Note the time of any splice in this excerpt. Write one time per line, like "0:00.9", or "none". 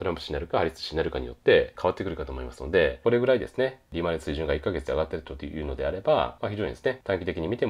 0:01.7
0:03.0
0:06.6